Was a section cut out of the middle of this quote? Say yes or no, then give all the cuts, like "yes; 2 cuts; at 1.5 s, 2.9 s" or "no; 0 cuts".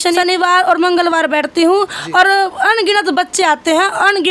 no; 0 cuts